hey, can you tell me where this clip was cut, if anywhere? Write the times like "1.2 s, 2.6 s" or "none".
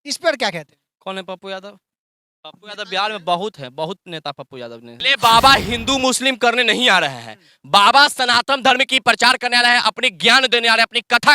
5.0 s